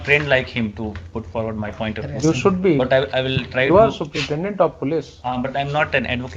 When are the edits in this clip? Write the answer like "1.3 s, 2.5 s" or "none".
none